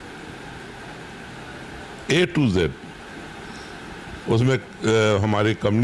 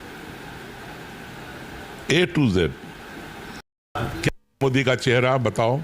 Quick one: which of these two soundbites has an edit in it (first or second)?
second